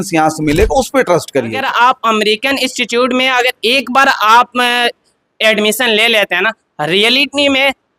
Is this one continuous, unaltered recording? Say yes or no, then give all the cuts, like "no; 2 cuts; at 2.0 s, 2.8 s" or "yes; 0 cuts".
no; 1 cut; at 1.6 s